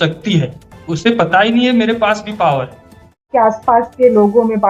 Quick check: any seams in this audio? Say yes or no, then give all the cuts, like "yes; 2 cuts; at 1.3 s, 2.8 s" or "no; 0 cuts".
yes; 1 cut; at 3.3 s